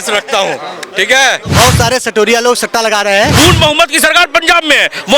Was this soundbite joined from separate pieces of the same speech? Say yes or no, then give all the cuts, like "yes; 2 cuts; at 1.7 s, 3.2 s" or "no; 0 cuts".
yes; 2 cuts; at 1.5 s, 3.3 s